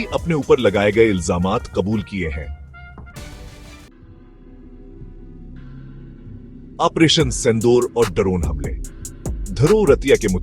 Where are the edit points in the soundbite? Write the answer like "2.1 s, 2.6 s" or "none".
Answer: 3.9 s